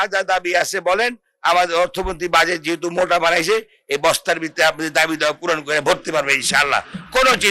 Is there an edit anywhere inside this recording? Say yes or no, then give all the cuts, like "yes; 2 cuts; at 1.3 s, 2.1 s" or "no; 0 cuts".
no; 0 cuts